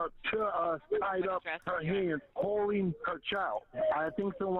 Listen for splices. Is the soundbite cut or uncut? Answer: cut